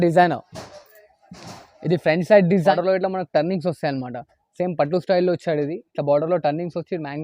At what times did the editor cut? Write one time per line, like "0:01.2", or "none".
0:02.6